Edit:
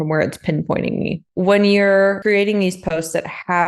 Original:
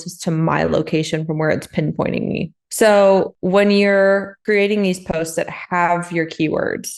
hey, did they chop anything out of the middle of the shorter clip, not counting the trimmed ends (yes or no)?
yes